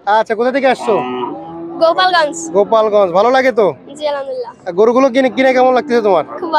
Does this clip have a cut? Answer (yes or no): no